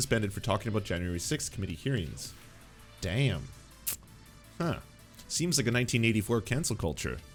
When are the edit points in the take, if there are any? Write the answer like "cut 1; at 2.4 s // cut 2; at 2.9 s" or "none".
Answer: none

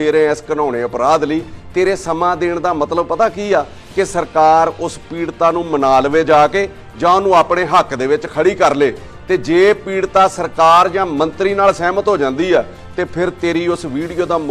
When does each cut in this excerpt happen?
none

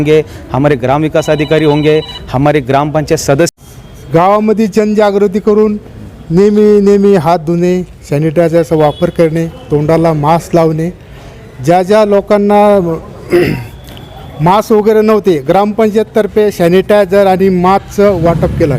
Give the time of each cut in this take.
cut 1; at 3.6 s

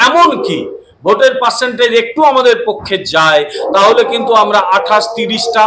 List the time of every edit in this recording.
none

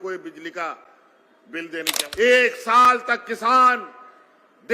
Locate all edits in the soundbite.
cut 1; at 2.0 s

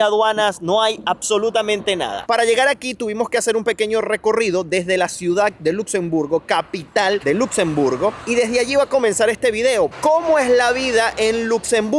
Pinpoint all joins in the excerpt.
none

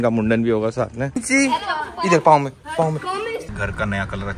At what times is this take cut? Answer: cut 1; at 1.2 s // cut 2; at 3.5 s

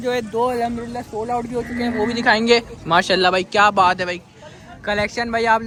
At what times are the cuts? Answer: none

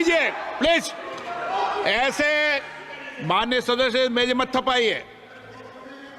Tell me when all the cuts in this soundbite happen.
none

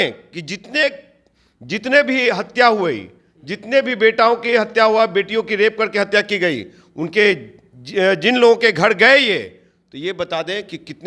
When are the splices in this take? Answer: none

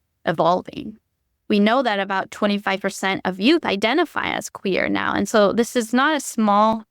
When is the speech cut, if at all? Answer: cut 1; at 1.3 s

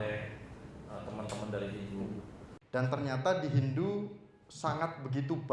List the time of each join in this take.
cut 1; at 2.4 s

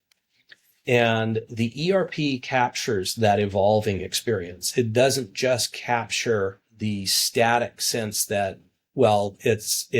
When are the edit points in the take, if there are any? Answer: cut 1; at 6.7 s

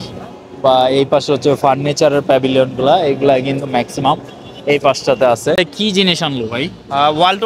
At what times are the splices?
cut 1; at 5.6 s

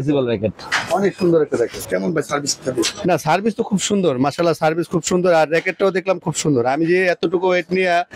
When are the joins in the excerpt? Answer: cut 1; at 1.8 s

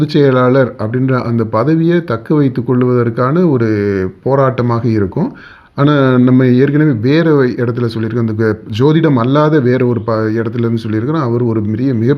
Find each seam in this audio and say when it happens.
none

